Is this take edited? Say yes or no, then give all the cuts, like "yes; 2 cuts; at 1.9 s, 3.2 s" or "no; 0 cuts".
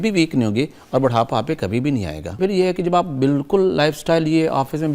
yes; 1 cut; at 2.4 s